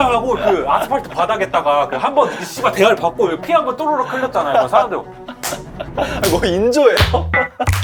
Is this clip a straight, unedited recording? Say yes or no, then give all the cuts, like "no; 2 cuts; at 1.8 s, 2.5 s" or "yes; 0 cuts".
yes; 0 cuts